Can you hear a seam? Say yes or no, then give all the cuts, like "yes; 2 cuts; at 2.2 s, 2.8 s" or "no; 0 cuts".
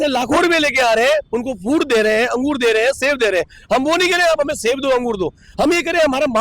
no; 0 cuts